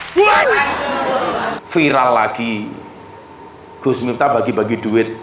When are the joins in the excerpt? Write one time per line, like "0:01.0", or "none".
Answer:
0:01.6